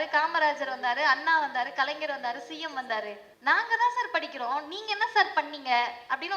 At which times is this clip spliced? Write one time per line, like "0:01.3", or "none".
0:03.2